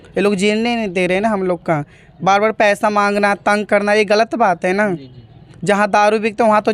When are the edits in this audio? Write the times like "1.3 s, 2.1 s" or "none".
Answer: none